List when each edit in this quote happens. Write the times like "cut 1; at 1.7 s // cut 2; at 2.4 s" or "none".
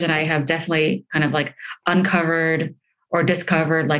none